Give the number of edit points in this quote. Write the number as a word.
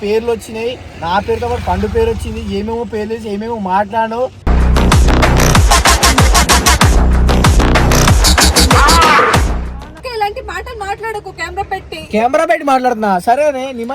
one